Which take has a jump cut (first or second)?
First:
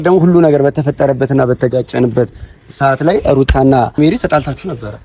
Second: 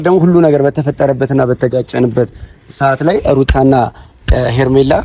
first